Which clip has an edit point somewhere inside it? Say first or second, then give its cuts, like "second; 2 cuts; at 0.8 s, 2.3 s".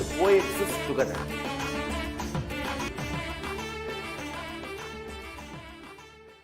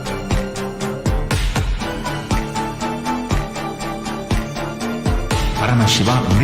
first; 1 cut; at 2.9 s